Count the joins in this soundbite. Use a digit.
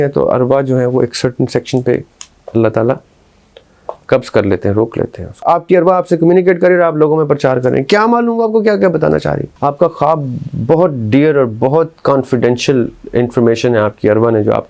2